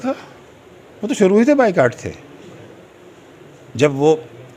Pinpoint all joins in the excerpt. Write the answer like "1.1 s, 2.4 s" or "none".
none